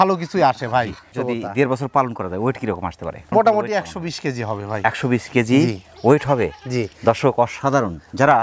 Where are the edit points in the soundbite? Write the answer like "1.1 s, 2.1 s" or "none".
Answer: none

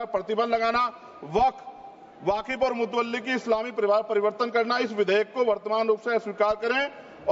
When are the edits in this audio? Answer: none

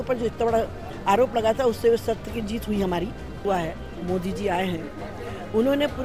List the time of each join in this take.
3.4 s

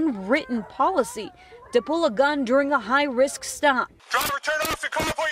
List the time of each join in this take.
3.9 s

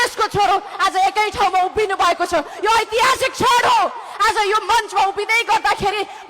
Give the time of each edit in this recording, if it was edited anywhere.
none

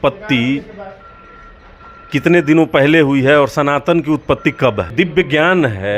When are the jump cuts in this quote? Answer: 4.9 s

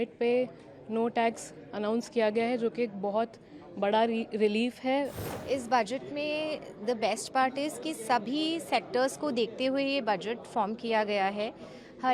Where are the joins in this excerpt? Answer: 5.2 s

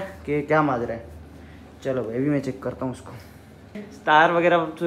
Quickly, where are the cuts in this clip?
3.9 s

